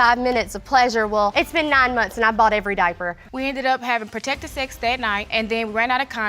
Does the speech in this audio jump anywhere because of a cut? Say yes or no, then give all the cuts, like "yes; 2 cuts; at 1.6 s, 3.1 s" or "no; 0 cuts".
yes; 1 cut; at 3.2 s